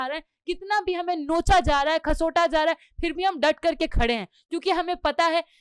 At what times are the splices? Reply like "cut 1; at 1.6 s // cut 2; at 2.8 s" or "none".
none